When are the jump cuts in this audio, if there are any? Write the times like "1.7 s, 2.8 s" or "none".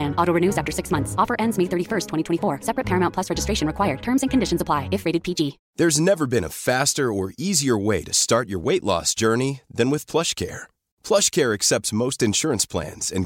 5.6 s

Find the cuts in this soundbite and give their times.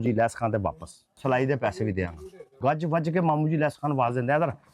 1.2 s, 2.6 s

